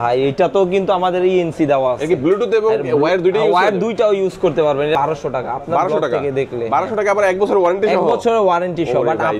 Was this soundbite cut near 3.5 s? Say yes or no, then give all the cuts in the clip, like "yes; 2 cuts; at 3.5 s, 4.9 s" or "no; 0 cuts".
no; 1 cut; at 4.9 s